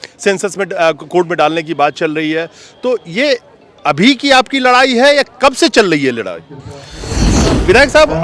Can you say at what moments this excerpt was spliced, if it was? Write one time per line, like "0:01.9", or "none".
0:07.2